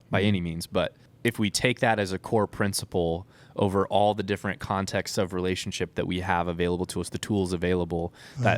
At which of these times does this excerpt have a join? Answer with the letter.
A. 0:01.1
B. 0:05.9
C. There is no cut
A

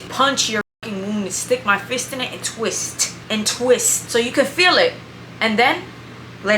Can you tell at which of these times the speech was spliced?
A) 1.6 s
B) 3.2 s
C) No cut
C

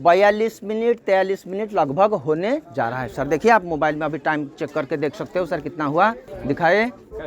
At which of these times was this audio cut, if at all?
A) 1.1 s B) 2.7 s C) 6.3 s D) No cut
C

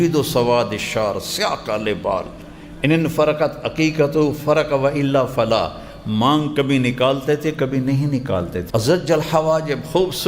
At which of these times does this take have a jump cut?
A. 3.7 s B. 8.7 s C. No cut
B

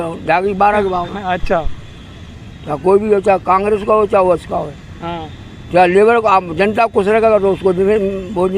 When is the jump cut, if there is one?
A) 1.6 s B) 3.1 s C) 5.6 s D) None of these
D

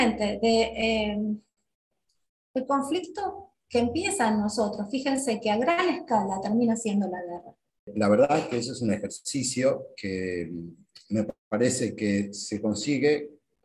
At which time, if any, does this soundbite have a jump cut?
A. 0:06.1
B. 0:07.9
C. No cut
B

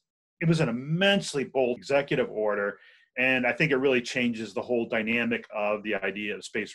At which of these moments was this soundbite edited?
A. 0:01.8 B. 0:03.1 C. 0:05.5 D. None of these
A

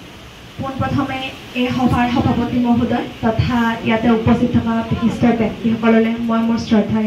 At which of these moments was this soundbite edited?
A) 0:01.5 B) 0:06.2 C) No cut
C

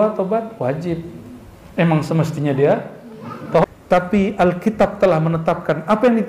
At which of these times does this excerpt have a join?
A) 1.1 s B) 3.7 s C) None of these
B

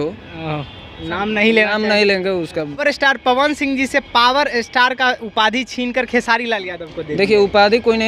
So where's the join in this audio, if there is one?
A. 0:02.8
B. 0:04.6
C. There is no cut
A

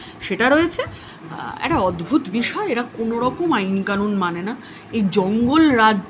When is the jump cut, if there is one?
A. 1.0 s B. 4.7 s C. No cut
A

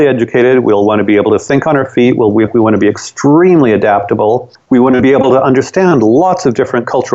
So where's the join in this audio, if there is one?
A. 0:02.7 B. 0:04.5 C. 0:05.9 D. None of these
B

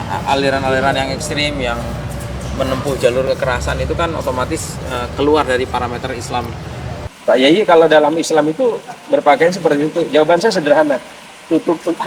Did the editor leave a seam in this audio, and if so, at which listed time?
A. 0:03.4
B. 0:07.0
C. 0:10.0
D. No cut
B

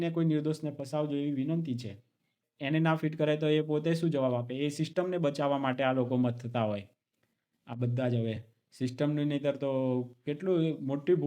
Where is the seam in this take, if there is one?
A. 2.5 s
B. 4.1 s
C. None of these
A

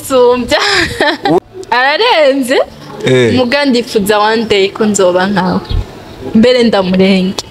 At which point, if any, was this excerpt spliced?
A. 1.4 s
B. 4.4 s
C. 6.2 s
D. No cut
A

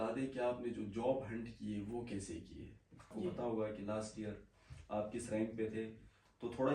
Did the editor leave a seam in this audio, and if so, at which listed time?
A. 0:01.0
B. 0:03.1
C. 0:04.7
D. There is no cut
B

